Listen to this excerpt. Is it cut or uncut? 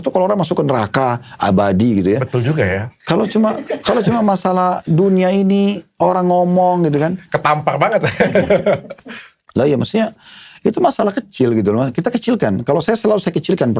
uncut